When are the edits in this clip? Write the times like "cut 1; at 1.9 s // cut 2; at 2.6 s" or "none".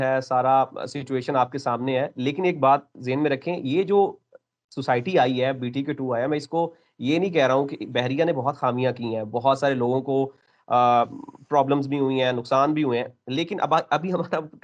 none

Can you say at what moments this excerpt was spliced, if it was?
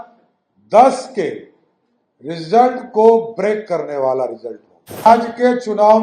cut 1; at 5.1 s

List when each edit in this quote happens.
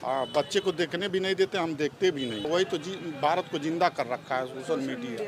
cut 1; at 2.5 s

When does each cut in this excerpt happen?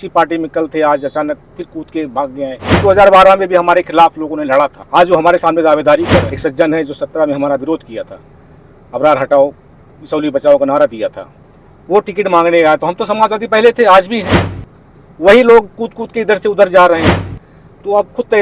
cut 1; at 2.8 s // cut 2; at 4.8 s // cut 3; at 6.3 s

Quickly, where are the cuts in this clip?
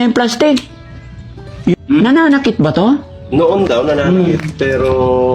cut 1; at 1.8 s

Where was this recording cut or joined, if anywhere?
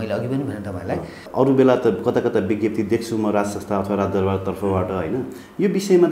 cut 1; at 1.2 s

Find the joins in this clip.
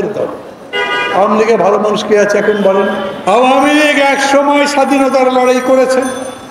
none

